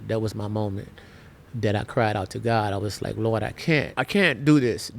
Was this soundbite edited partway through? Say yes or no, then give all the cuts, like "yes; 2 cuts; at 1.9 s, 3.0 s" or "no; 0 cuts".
yes; 1 cut; at 3.9 s